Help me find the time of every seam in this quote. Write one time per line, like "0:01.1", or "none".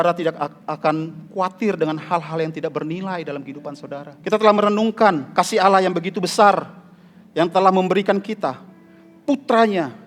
0:04.1
0:05.2